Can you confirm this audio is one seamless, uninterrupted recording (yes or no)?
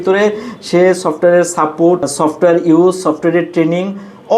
no